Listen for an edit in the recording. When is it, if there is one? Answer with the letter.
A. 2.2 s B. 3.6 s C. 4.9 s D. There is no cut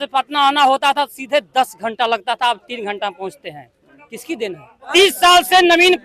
C